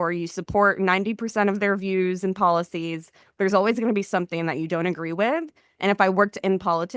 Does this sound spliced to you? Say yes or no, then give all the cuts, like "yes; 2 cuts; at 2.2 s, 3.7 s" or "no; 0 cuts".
no; 0 cuts